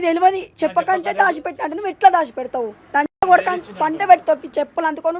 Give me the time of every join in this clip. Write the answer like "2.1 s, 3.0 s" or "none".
none